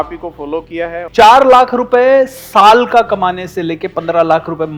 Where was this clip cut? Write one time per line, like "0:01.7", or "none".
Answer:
0:00.9